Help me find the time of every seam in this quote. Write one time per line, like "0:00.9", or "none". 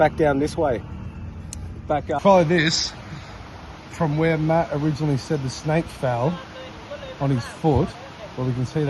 0:02.1